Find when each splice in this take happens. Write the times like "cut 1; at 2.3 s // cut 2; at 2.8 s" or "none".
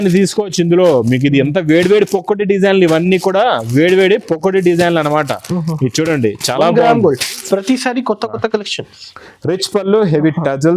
cut 1; at 7.4 s